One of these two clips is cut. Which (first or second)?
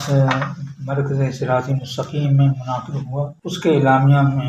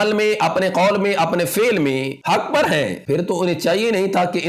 second